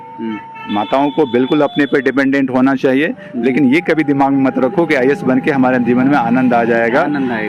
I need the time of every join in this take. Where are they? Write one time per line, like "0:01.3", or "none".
none